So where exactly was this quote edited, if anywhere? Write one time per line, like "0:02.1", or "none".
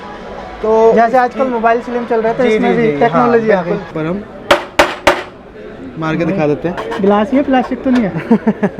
0:03.9